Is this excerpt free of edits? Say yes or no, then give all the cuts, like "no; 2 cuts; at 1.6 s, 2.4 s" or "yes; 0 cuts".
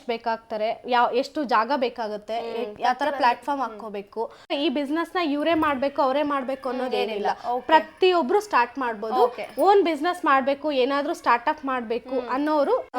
no; 1 cut; at 4.5 s